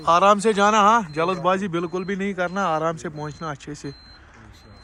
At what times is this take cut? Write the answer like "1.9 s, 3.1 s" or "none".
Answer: none